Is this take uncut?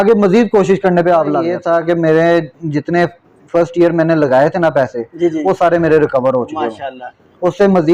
no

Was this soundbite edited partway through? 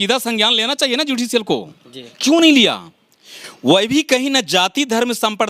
no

